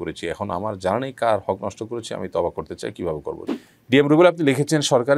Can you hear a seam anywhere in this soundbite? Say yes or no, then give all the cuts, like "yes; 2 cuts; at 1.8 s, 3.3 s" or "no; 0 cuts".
yes; 1 cut; at 3.4 s